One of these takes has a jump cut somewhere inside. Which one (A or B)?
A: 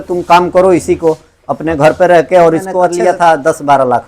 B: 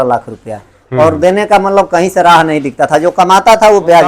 A